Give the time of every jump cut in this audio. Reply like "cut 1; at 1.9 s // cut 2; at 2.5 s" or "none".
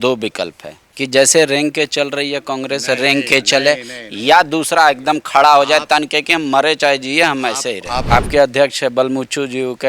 cut 1; at 7.9 s